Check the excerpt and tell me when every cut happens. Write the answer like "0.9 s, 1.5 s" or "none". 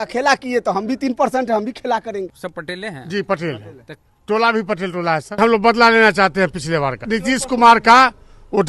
2.3 s, 5.4 s, 7.0 s